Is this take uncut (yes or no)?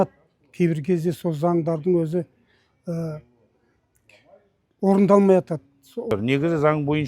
no